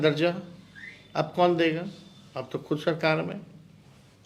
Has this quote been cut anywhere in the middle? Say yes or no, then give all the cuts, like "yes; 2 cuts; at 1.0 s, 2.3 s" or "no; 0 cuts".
no; 0 cuts